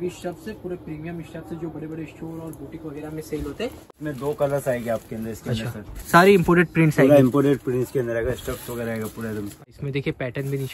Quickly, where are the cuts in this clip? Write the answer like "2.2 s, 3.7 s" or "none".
3.8 s, 5.9 s, 9.6 s